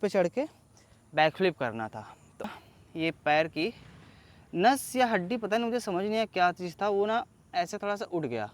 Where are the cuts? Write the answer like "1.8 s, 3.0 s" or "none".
2.5 s

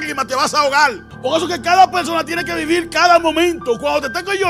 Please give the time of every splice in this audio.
1.1 s

